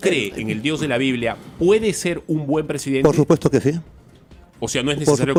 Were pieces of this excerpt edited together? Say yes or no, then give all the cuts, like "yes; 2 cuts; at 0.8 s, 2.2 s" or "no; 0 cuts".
no; 0 cuts